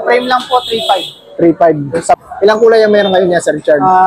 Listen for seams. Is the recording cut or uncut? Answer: cut